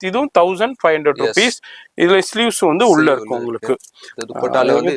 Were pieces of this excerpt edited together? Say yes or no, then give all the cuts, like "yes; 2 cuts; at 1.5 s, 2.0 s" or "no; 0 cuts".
no; 0 cuts